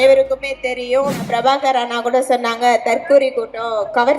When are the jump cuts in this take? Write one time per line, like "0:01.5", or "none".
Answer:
0:01.3